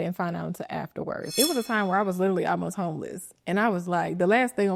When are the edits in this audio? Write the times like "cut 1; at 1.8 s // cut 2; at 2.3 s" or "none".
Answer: cut 1; at 1.3 s